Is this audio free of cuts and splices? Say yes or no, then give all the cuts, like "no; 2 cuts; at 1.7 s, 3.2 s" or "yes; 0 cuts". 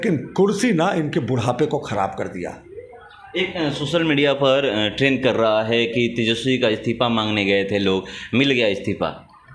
yes; 0 cuts